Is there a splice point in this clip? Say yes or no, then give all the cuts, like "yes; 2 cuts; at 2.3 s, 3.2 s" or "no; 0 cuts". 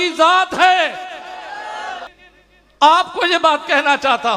yes; 1 cut; at 2.2 s